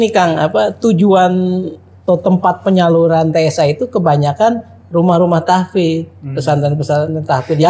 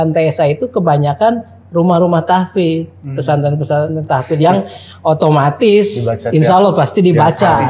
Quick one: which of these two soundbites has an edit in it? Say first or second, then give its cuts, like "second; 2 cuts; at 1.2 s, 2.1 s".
first; 1 cut; at 2.0 s